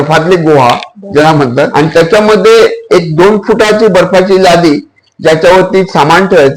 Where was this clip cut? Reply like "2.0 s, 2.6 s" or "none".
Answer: 1.7 s